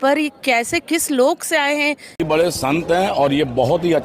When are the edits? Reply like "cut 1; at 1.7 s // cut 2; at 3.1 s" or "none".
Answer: cut 1; at 2.2 s